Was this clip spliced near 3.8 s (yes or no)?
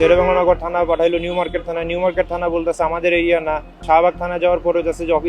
yes